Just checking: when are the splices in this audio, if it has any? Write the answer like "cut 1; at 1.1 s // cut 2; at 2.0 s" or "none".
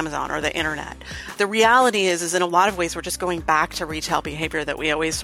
cut 1; at 1.4 s